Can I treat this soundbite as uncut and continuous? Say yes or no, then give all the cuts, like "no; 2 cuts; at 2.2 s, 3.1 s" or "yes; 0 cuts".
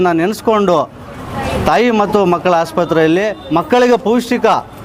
yes; 0 cuts